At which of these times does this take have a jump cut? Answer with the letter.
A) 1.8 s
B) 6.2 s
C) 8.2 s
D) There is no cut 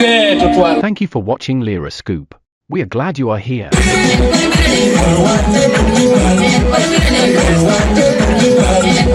D